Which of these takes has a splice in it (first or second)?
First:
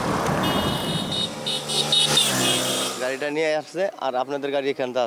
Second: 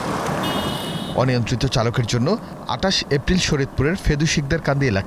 first